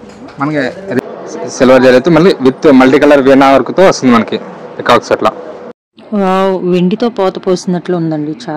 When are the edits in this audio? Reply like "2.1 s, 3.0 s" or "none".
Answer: 1.0 s